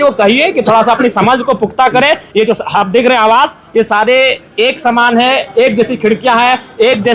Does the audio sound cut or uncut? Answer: uncut